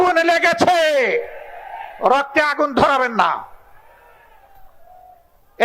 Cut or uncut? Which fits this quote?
uncut